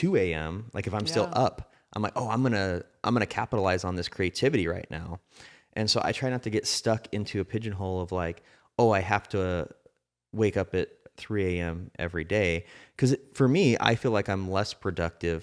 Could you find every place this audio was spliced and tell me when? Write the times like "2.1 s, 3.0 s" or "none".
none